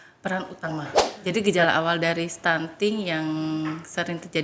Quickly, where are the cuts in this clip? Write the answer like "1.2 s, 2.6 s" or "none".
1.0 s